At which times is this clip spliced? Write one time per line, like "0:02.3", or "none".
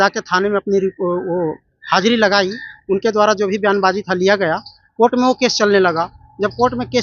none